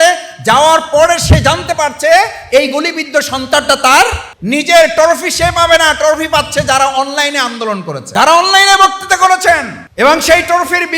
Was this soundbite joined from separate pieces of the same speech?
yes; 3 cuts; at 4.3 s, 8.0 s, 9.8 s

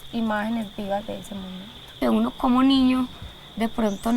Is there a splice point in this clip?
yes; 1 cut; at 1.9 s

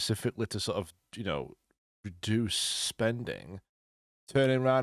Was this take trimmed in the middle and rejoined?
no; 0 cuts

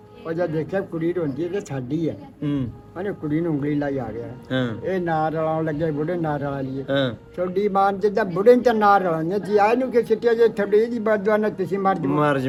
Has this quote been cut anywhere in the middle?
no; 0 cuts

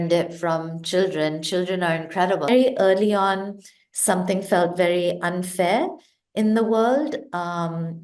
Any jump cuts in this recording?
yes; 1 cut; at 2.5 s

